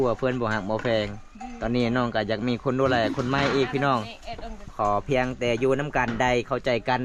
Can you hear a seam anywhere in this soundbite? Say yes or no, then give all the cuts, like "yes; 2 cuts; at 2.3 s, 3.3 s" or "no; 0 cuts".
no; 0 cuts